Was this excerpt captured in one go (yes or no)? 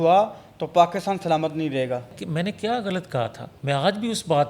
no